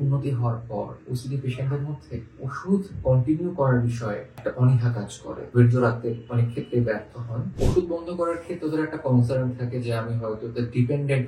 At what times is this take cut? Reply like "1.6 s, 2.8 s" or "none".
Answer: 4.4 s, 5.5 s, 7.5 s